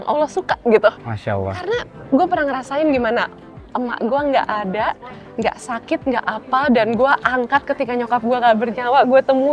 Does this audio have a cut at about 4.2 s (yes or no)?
no